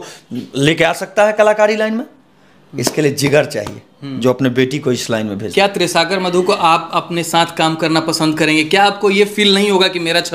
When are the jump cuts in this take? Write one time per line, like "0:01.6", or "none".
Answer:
0:05.5